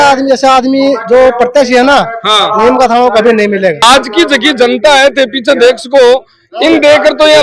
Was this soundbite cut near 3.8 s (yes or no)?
yes